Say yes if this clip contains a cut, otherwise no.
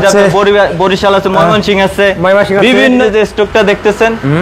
yes